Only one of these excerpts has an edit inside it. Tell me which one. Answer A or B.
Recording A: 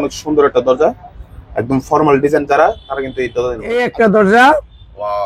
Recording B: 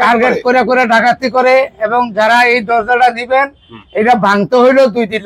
A